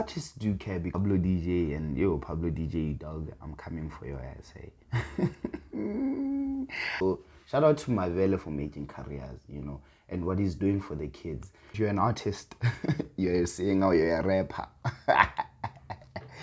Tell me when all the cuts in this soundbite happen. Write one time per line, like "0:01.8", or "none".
0:00.9
0:07.0
0:11.6